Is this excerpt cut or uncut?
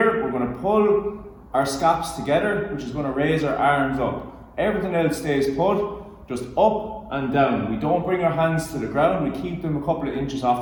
uncut